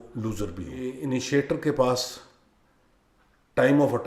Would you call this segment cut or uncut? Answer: cut